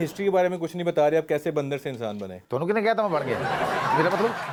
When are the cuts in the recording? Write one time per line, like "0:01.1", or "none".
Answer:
none